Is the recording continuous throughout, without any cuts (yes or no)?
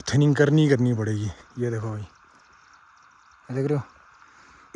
yes